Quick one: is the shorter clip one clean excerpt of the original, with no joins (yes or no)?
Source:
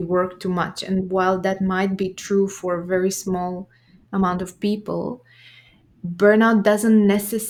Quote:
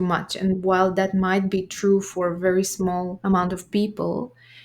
no